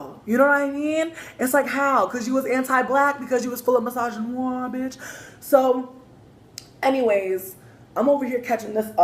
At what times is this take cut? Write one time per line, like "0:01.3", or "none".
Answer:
0:01.8